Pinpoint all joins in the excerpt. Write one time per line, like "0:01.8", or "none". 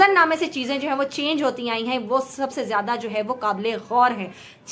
none